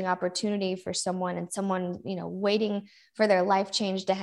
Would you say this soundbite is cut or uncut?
uncut